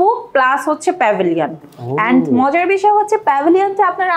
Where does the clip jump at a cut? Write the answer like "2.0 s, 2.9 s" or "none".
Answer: none